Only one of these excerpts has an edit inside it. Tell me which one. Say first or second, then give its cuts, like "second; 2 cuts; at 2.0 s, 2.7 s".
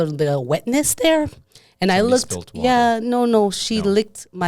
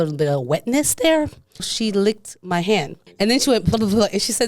second; 2 cuts; at 1.7 s, 3.0 s